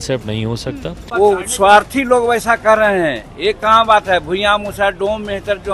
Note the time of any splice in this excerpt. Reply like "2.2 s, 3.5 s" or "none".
1.1 s